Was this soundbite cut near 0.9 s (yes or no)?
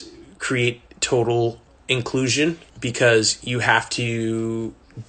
no